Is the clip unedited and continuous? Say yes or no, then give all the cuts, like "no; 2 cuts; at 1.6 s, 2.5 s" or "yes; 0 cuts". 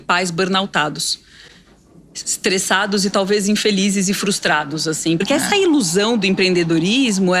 no; 1 cut; at 5.2 s